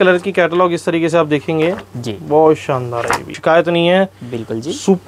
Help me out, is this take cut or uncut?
cut